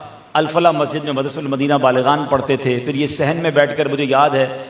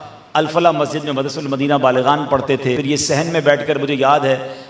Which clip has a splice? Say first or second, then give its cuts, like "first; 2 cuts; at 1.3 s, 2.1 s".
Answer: second; 1 cut; at 2.8 s